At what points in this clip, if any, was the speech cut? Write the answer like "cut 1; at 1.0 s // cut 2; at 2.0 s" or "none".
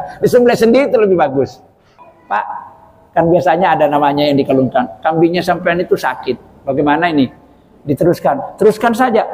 cut 1; at 1.9 s